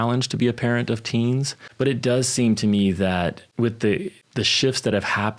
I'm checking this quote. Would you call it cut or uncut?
cut